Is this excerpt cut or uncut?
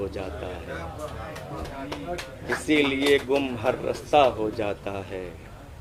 uncut